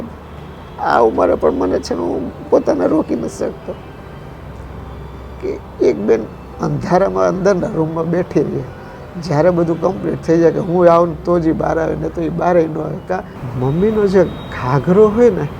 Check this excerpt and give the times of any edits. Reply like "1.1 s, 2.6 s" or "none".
13.4 s